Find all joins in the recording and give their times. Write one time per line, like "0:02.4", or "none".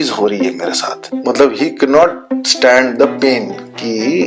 0:01.0